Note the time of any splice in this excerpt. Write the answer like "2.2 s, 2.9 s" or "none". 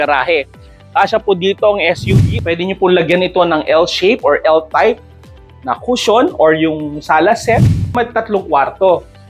2.0 s, 7.9 s